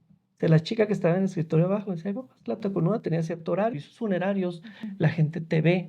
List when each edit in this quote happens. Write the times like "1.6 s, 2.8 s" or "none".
3.8 s